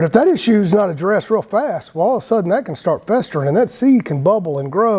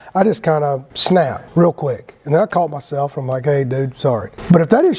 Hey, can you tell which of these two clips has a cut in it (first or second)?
second